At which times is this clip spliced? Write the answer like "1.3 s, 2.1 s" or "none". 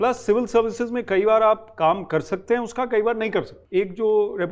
3.6 s